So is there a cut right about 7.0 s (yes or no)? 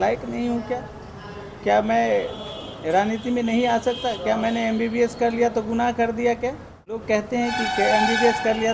yes